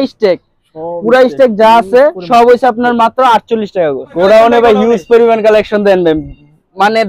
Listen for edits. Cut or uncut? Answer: cut